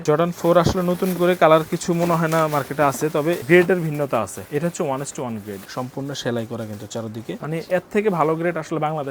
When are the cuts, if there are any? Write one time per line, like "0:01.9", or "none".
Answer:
0:03.4
0:04.4
0:05.6
0:07.4